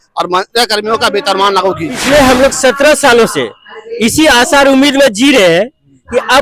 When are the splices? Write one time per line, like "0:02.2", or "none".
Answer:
0:02.0